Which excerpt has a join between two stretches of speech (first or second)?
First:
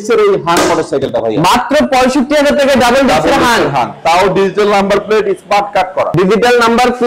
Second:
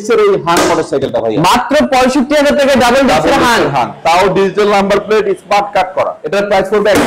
second